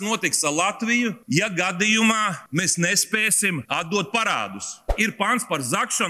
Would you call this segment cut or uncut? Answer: cut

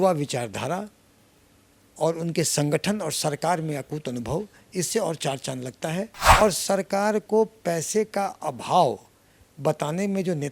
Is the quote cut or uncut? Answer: cut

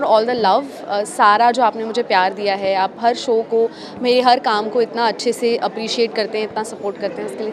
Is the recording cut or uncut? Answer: uncut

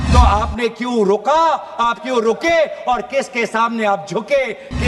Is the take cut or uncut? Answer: uncut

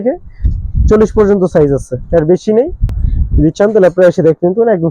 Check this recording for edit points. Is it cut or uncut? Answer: uncut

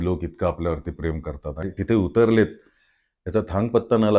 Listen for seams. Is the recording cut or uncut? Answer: cut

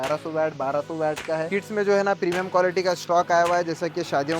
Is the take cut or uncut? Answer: cut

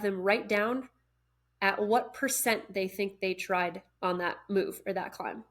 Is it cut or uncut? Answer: cut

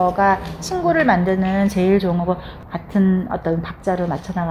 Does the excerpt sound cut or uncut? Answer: cut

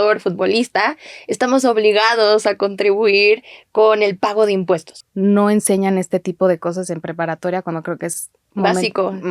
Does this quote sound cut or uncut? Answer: cut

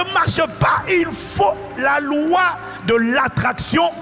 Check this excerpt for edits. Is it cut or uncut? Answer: uncut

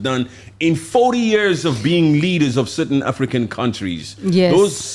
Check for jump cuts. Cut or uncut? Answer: uncut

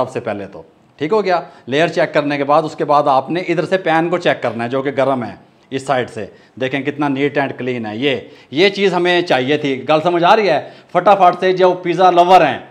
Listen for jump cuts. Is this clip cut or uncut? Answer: uncut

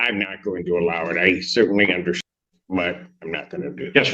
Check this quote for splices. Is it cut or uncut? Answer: cut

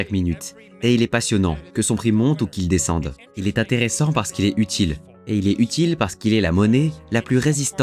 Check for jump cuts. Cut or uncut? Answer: uncut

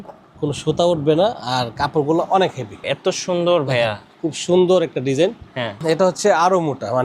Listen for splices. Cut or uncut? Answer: cut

